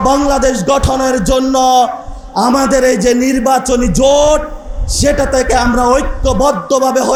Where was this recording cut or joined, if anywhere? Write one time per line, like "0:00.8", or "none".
none